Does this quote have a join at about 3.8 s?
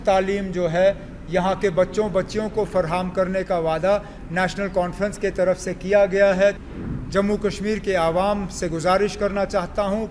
no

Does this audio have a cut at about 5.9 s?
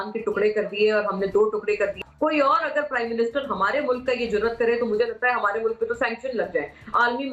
no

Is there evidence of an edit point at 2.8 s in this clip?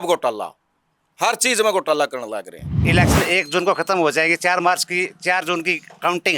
yes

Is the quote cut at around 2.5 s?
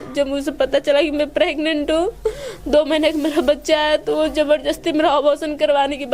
no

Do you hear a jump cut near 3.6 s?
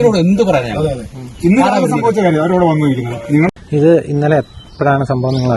yes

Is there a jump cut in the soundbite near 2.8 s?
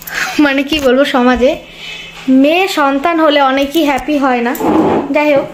no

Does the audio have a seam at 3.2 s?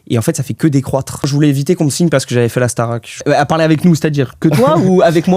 yes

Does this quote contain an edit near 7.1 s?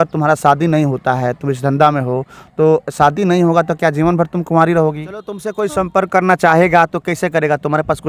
no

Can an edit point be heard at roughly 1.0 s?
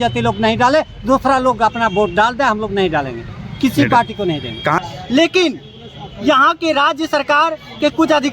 no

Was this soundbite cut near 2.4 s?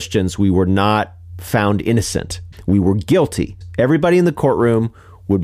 yes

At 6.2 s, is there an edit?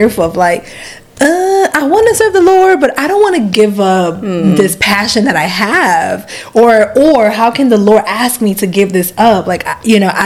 no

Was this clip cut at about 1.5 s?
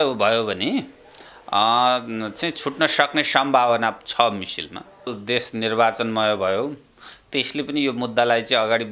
no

